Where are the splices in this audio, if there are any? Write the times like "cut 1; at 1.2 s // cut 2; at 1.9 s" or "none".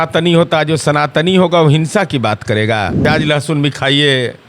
cut 1; at 3.1 s